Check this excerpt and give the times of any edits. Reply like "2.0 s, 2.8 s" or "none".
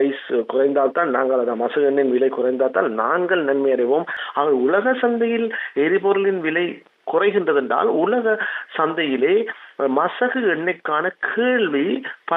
4.2 s